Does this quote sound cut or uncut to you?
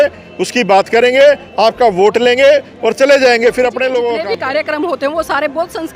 cut